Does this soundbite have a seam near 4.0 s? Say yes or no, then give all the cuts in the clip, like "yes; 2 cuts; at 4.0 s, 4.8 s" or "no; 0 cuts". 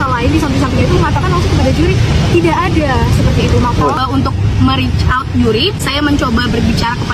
yes; 1 cut; at 4.0 s